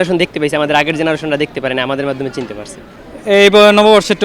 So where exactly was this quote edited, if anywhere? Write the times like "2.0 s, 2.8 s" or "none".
none

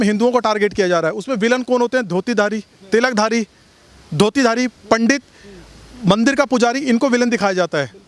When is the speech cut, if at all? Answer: none

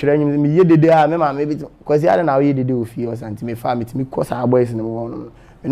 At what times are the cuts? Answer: none

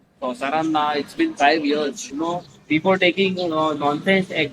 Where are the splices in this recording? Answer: 2.0 s

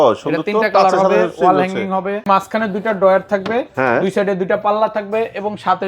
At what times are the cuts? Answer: 2.2 s

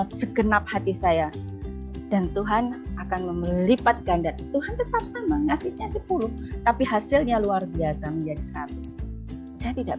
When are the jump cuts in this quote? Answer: none

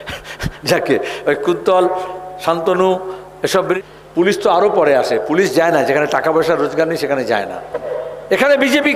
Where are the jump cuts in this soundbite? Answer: 3.8 s, 7.9 s

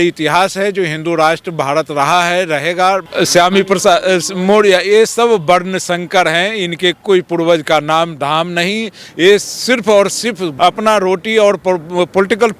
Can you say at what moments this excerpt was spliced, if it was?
3.1 s, 7.0 s, 10.4 s

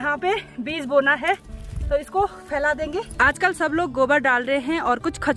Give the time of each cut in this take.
none

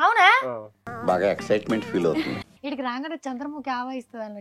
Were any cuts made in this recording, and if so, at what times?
2.5 s

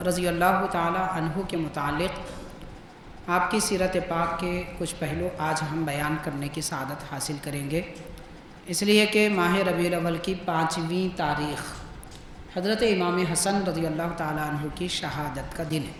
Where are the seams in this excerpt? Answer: none

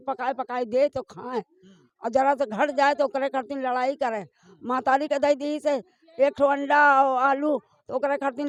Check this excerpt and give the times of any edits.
none

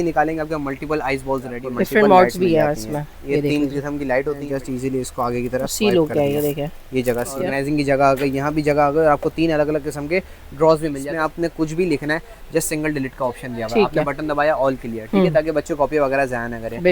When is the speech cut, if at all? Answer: 1.6 s, 4.5 s, 7.4 s, 11.0 s

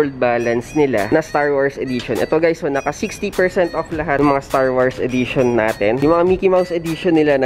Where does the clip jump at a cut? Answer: 1.1 s, 4.2 s, 6.0 s

